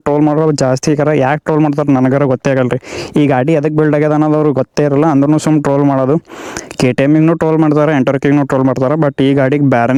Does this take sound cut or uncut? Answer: uncut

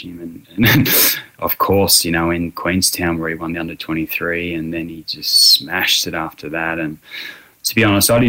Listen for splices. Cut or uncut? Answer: uncut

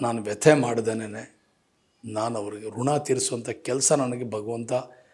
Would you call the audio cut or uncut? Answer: uncut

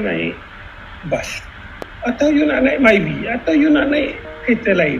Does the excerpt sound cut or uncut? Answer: cut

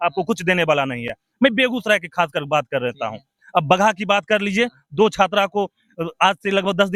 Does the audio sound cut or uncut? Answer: uncut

